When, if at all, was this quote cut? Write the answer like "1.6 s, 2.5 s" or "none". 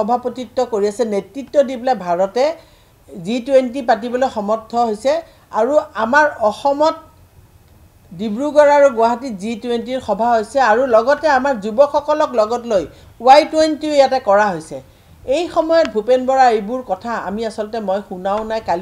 none